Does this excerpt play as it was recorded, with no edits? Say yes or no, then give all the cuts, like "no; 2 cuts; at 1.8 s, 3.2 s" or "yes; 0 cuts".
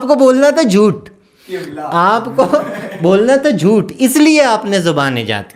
yes; 0 cuts